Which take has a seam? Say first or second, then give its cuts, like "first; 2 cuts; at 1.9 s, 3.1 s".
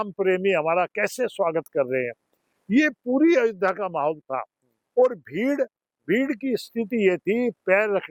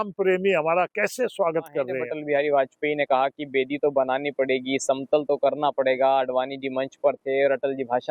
second; 1 cut; at 2.1 s